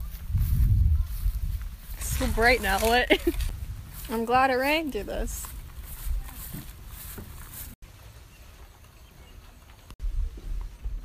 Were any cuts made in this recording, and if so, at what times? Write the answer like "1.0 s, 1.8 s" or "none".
7.8 s, 10.0 s